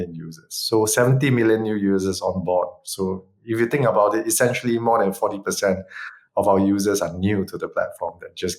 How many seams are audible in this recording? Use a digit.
0